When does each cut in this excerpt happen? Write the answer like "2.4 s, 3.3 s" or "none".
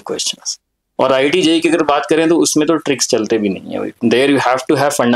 none